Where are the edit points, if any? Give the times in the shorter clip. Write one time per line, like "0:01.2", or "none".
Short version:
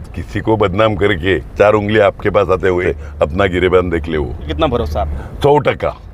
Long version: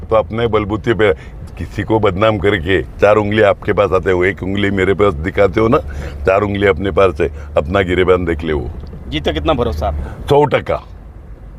0:02.9
0:04.5